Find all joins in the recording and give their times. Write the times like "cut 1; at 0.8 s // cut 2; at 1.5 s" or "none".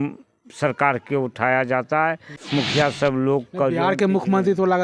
cut 1; at 2.3 s